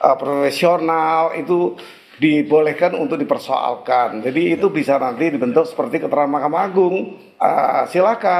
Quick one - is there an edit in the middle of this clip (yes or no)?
no